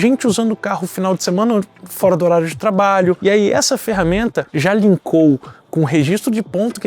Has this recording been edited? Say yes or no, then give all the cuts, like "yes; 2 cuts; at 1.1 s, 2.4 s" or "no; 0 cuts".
yes; 1 cut; at 3.2 s